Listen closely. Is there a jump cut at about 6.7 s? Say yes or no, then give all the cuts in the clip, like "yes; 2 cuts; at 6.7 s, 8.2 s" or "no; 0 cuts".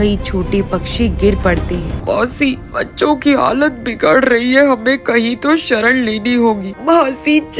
yes; 2 cuts; at 1.9 s, 6.7 s